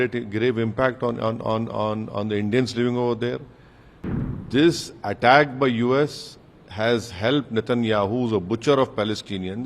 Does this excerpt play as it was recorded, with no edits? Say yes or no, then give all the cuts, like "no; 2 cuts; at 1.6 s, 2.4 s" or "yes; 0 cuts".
no; 1 cut; at 4.2 s